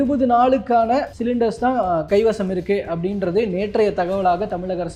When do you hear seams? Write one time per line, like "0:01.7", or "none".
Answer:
none